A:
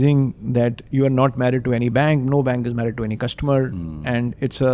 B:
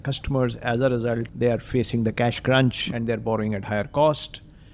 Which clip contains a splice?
B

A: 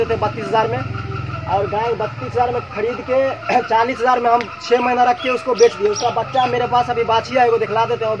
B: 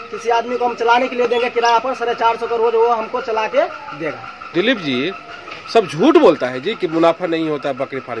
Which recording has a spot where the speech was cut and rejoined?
B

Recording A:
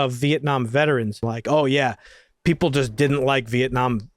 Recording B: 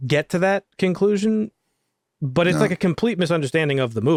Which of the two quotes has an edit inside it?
A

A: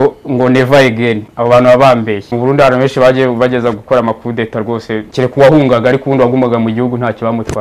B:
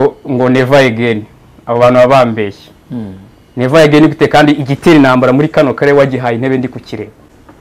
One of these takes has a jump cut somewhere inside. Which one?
A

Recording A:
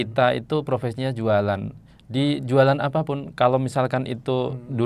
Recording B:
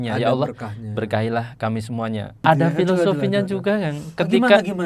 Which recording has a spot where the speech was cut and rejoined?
B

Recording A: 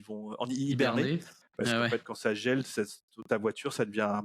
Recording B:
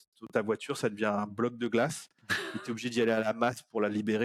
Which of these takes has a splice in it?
A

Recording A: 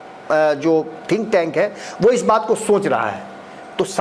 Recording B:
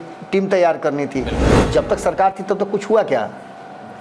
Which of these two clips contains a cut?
B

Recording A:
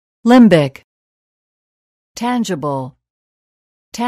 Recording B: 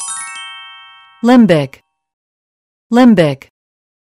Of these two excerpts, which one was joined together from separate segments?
B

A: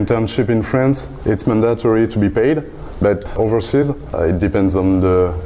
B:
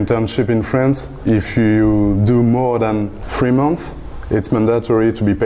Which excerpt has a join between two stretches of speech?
A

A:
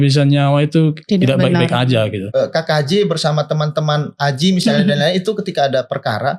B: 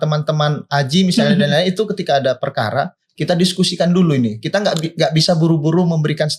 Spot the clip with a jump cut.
A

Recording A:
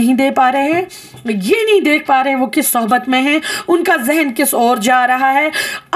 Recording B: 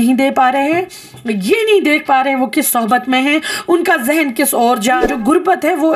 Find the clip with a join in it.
B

